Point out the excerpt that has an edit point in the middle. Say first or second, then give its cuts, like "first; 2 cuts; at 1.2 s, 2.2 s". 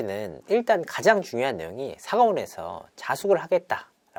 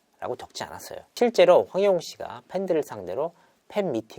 second; 1 cut; at 1.2 s